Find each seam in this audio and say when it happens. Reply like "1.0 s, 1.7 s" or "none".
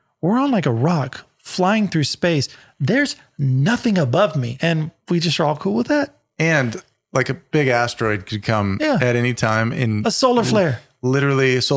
4.5 s